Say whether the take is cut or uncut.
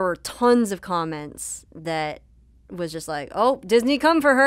uncut